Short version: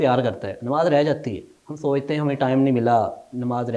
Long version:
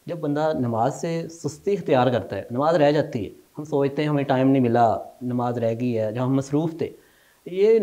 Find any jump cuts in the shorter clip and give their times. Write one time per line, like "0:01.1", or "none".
none